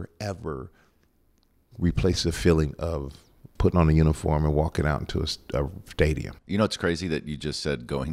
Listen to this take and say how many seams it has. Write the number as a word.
one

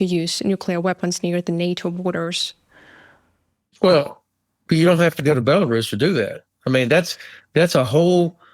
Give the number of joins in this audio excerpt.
zero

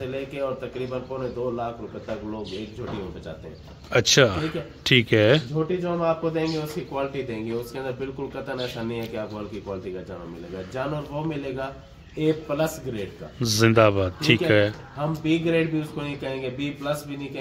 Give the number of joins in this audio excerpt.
zero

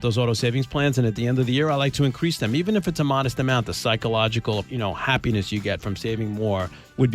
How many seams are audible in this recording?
one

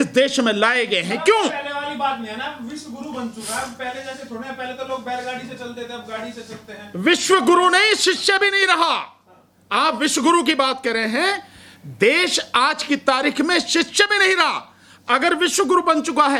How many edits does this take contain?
zero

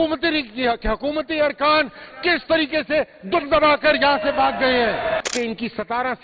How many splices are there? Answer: one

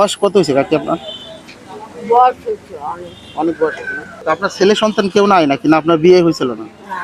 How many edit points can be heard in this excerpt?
one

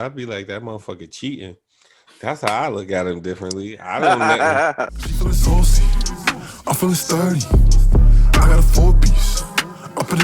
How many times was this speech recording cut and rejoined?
one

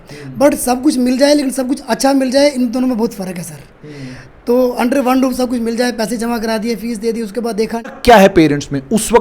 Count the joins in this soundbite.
one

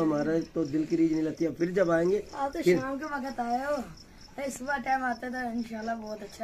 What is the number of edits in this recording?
zero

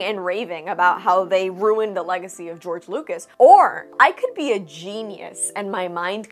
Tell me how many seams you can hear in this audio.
two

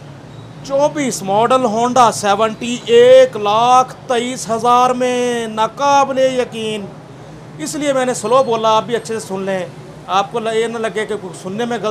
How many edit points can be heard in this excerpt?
zero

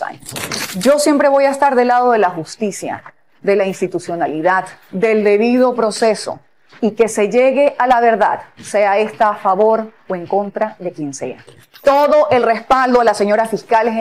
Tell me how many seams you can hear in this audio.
one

